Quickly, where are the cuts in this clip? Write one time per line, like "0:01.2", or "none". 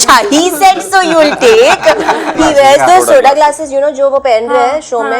0:02.3